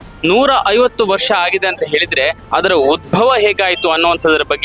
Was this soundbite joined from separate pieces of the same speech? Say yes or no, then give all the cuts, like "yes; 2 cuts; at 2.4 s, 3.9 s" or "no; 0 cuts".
no; 0 cuts